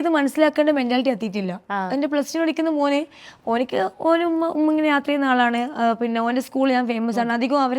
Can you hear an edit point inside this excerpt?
no; 0 cuts

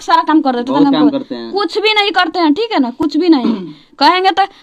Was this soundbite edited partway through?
no; 0 cuts

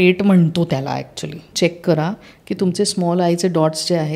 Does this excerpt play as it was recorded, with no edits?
no; 1 cut; at 1.5 s

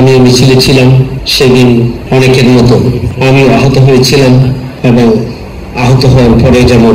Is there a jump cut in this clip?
yes; 4 cuts; at 1.2 s, 2.0 s, 3.1 s, 4.7 s

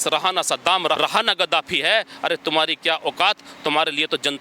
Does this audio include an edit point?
yes; 1 cut; at 1.0 s

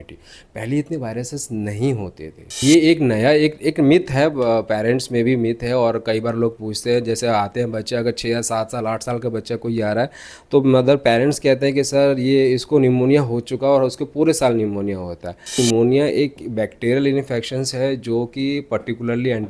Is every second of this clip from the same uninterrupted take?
no; 2 cuts; at 2.6 s, 15.6 s

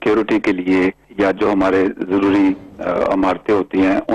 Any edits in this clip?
yes; 1 cut; at 1.0 s

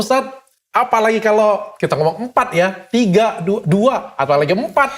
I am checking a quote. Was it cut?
no; 0 cuts

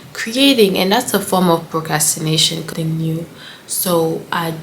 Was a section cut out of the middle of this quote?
yes; 1 cut; at 2.7 s

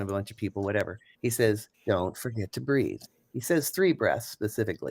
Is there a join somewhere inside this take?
yes; 3 cuts; at 1.0 s, 1.7 s, 3.1 s

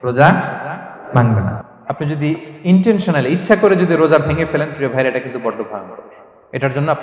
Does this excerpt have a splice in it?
yes; 1 cut; at 1.6 s

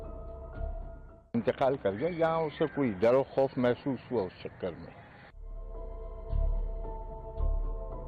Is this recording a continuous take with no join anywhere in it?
yes; 0 cuts

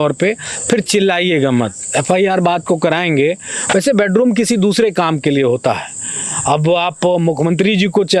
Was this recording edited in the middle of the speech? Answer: no; 0 cuts

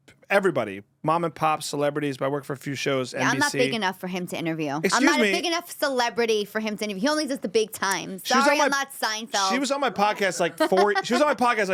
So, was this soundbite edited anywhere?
no; 0 cuts

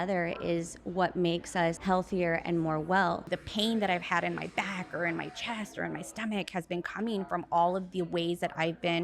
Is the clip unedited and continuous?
no; 2 cuts; at 1.8 s, 3.4 s

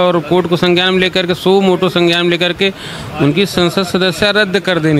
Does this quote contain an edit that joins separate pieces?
no; 0 cuts

